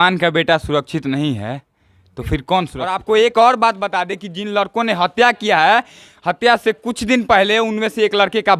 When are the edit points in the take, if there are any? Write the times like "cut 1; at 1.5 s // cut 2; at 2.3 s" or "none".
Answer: cut 1; at 3.0 s